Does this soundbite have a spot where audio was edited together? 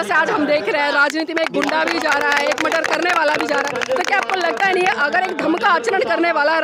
no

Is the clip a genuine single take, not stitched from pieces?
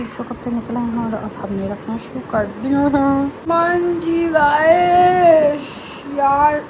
no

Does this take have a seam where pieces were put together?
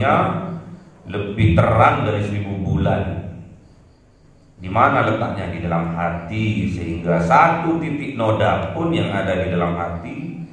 no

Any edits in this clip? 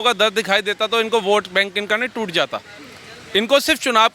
no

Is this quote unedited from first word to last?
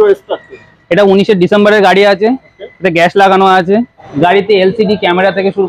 no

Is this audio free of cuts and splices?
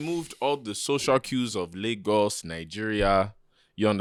yes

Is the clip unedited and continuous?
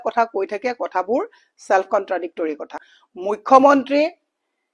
no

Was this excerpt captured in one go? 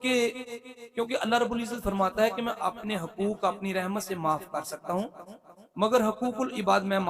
yes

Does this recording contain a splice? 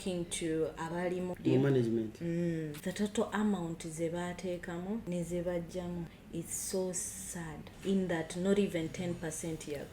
yes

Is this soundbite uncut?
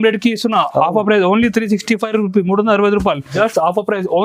no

